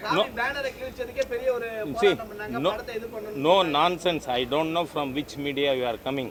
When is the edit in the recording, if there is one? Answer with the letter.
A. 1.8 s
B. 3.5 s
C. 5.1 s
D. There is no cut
D